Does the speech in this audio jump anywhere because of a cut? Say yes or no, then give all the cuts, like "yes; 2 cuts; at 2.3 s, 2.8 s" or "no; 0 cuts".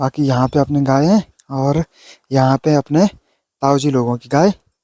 no; 0 cuts